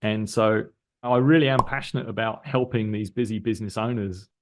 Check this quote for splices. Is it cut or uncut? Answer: uncut